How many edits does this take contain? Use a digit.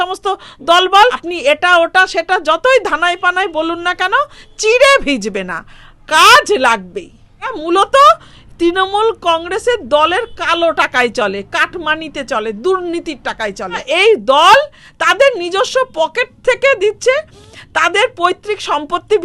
3